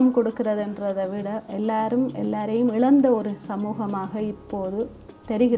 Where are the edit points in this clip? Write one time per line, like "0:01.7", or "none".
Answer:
none

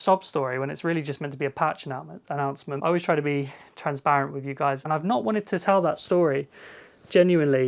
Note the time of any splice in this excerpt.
0:02.8
0:04.8

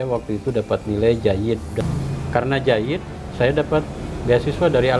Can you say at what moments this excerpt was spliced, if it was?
0:01.8

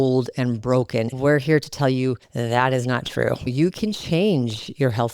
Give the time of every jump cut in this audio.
0:01.1
0:03.5

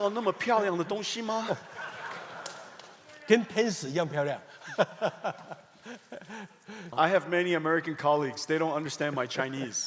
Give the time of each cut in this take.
0:06.9

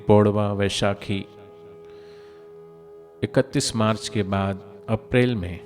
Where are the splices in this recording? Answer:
none

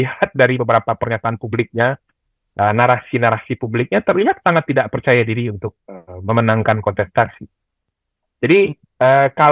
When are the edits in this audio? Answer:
none

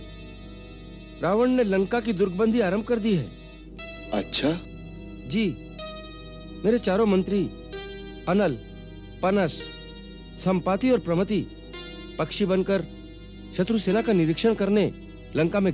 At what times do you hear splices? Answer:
none

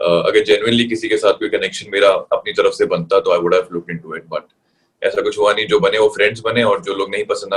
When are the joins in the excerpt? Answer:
none

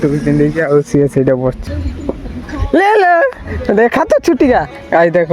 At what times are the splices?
0:01.6

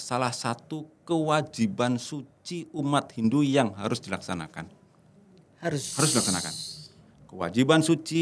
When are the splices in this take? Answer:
none

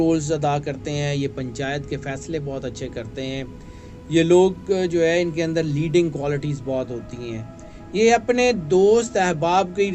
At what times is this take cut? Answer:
none

